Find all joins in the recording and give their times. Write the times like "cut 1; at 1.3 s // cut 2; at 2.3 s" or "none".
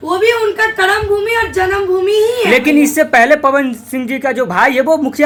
none